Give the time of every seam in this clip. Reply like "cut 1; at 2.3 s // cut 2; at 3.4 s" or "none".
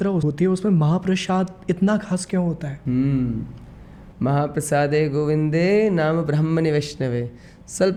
none